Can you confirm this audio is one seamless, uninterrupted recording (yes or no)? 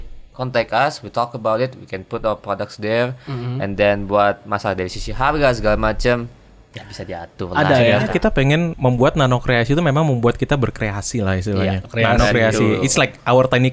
no